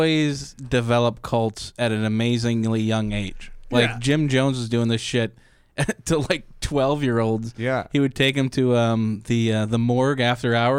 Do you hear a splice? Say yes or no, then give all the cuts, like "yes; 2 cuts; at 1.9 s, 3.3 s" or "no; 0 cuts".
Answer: no; 0 cuts